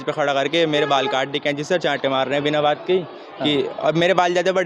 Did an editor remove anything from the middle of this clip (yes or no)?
no